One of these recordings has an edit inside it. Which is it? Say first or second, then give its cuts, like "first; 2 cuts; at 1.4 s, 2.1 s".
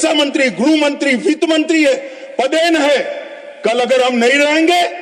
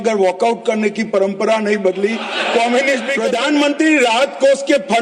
second; 1 cut; at 3.1 s